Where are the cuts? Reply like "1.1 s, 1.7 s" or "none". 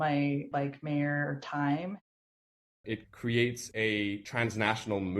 2.4 s